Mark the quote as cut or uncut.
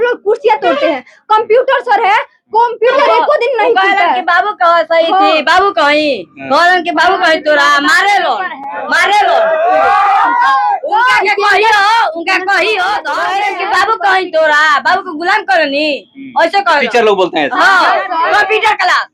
cut